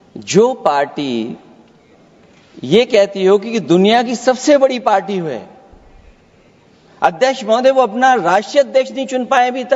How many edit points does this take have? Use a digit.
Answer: 0